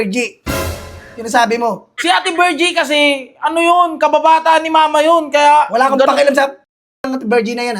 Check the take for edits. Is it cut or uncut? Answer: cut